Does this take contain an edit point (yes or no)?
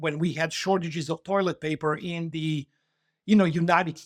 no